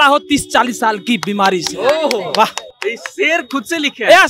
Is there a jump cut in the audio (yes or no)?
no